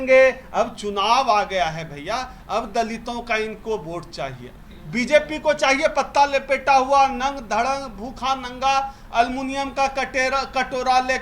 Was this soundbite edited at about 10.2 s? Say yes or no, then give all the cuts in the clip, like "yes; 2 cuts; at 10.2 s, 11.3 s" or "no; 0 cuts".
no; 1 cut; at 4.4 s